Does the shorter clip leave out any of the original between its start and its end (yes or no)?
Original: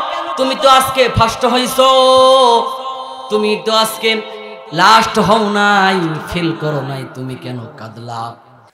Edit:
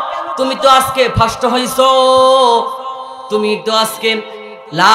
no